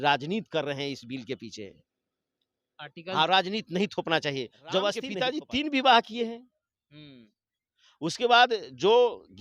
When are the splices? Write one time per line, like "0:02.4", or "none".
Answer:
0:05.1